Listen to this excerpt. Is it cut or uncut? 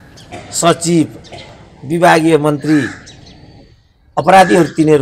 uncut